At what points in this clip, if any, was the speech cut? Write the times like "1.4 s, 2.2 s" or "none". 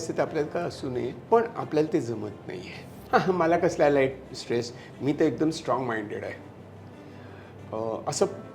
1.2 s, 2.9 s